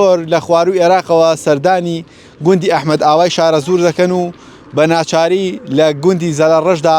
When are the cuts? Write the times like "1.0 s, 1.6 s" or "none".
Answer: none